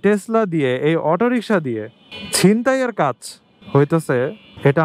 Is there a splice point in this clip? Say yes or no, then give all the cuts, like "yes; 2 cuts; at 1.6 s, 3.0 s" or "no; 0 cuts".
no; 0 cuts